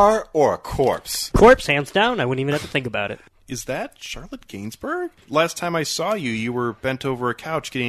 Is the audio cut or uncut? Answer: cut